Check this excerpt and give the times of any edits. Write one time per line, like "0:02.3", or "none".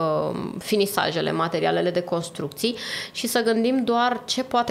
none